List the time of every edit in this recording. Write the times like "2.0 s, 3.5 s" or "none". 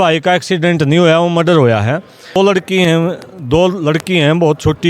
2.4 s